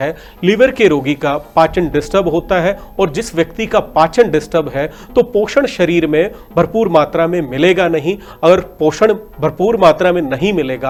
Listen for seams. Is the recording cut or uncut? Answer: uncut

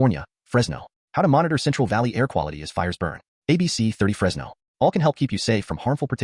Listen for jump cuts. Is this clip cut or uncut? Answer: uncut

